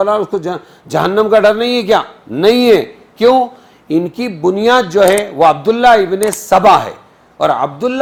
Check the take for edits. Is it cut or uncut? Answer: uncut